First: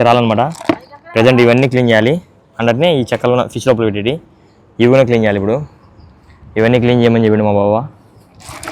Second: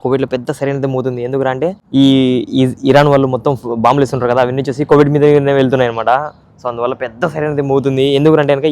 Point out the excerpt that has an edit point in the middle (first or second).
second